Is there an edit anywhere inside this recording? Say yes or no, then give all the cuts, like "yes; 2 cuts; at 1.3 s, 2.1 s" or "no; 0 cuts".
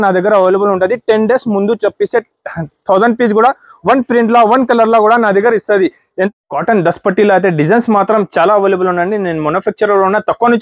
yes; 1 cut; at 6.3 s